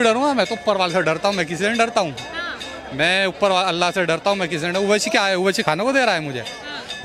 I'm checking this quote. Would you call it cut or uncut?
uncut